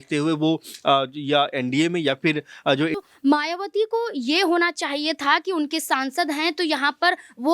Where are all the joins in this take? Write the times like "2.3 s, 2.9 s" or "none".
2.9 s